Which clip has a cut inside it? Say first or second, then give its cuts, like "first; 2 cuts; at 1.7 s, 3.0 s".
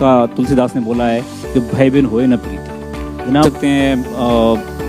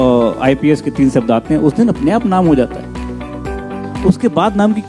first; 1 cut; at 3.4 s